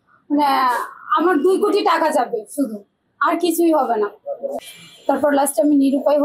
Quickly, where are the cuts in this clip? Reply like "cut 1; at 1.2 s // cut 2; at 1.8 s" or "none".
cut 1; at 4.7 s